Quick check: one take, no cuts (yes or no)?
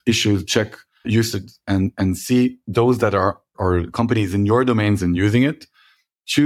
no